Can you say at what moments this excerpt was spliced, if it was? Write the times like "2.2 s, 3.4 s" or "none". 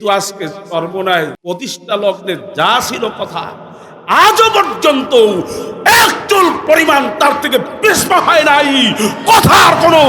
1.4 s